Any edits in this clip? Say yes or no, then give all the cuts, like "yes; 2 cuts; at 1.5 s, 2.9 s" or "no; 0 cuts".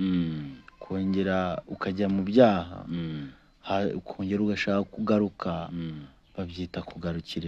no; 0 cuts